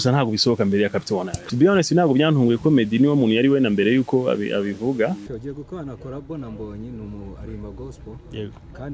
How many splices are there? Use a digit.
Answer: 2